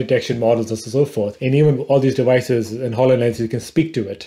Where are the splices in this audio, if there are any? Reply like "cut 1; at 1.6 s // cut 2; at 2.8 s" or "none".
cut 1; at 1.4 s

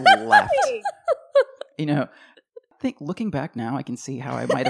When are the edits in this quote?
none

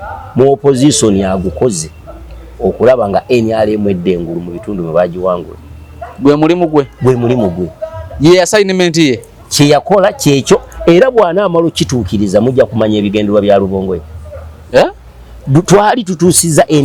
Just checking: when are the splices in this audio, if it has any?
none

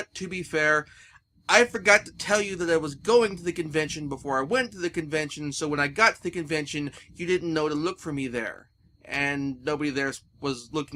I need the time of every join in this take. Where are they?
none

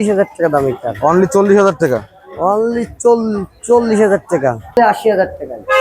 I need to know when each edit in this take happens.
cut 1; at 4.8 s

